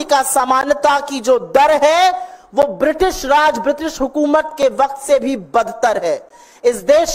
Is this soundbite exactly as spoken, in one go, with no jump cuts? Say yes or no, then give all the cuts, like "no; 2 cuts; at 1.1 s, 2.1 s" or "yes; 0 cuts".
yes; 0 cuts